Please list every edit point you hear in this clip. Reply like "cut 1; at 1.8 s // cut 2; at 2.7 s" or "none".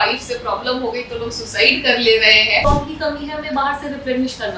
cut 1; at 2.6 s